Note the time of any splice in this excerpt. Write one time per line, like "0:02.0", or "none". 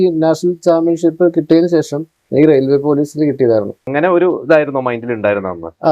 0:03.9